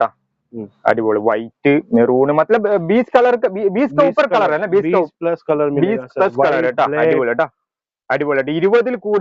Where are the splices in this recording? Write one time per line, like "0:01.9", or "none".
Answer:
none